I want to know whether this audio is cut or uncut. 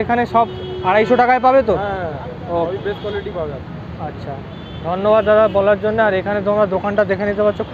uncut